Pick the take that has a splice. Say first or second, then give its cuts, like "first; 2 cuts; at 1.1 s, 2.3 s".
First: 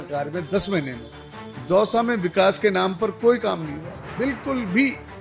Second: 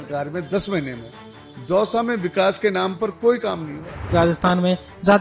second; 1 cut; at 4.1 s